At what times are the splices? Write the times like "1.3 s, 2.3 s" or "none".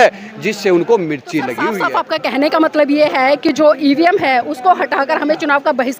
1.6 s